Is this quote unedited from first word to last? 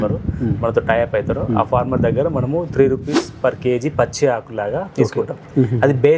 yes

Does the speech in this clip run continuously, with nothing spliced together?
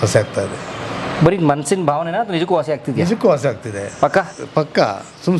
yes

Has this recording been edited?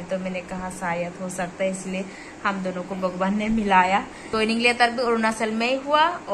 yes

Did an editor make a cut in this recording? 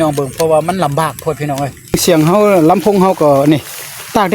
yes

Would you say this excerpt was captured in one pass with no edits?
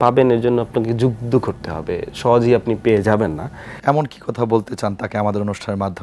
no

